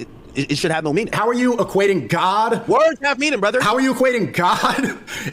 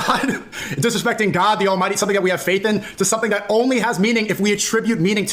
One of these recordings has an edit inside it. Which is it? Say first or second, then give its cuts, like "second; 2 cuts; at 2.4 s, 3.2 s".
first; 2 cuts; at 1.1 s, 3.5 s